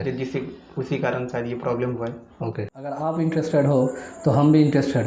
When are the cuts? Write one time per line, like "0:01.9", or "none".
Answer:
0:03.0